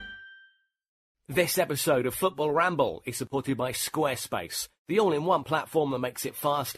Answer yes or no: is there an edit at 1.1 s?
yes